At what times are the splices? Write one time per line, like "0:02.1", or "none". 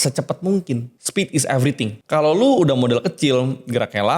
0:01.0
0:02.0